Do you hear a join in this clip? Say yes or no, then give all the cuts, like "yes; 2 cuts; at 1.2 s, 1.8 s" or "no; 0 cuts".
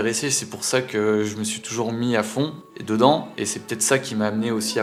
no; 0 cuts